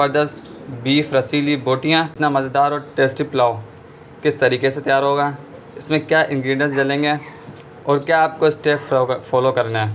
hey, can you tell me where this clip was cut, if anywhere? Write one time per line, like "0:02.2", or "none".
0:02.6